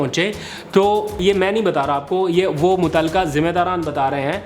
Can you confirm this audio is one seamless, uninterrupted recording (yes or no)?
no